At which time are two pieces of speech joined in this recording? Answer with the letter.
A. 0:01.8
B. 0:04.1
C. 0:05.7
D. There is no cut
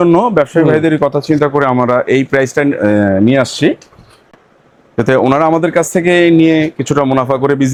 D